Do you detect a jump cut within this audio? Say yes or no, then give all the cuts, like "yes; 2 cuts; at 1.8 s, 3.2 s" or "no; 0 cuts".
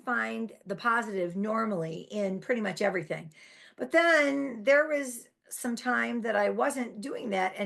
no; 0 cuts